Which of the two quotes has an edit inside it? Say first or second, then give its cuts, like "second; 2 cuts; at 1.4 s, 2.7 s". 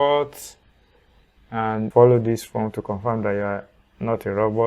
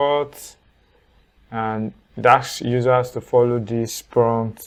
first; 1 cut; at 1.9 s